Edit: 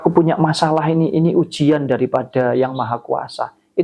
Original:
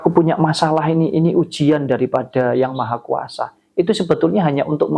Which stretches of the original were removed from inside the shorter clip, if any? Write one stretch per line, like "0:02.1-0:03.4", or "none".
none